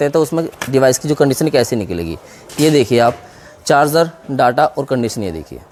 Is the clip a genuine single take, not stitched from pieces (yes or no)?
yes